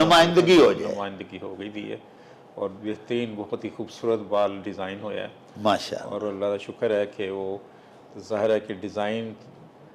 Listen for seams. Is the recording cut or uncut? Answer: uncut